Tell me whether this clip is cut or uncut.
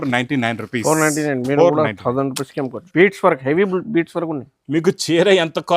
cut